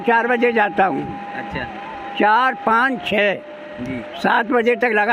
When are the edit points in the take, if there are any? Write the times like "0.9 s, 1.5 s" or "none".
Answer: none